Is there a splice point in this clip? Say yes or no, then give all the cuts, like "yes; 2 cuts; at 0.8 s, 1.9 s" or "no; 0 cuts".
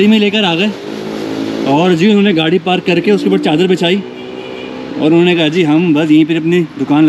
no; 0 cuts